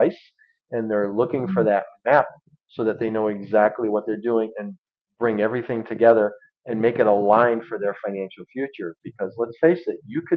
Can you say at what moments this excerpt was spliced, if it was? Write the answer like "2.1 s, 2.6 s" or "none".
none